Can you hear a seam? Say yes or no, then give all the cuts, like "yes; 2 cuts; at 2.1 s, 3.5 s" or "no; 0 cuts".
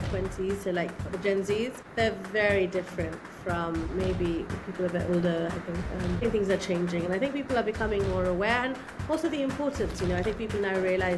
no; 0 cuts